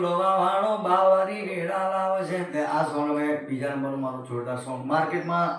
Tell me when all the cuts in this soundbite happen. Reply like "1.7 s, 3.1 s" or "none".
2.5 s

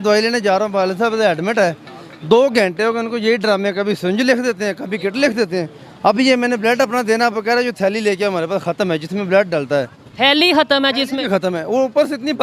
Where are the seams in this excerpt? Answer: none

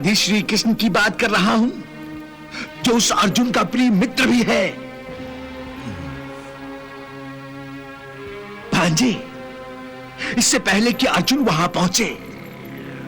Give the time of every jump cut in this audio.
none

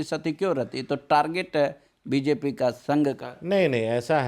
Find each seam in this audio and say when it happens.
none

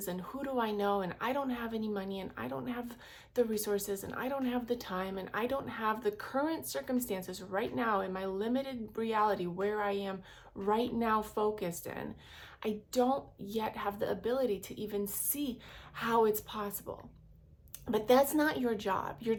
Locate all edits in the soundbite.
none

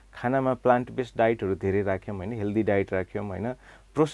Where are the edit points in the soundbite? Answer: none

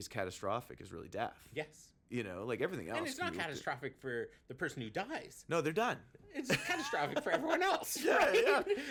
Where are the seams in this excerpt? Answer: none

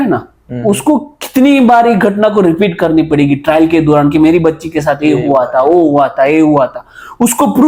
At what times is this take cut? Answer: none

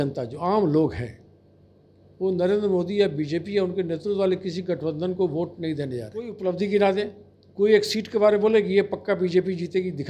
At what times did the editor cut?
6.3 s

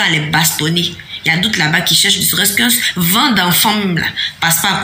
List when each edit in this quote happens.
none

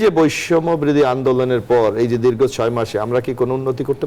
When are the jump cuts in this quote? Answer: none

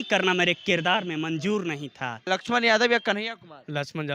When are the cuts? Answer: 2.2 s

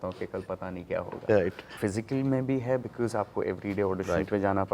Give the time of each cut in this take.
1.7 s

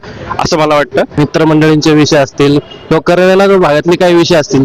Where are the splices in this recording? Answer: 1.1 s

